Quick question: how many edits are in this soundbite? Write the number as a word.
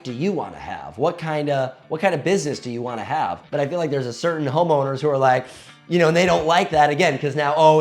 one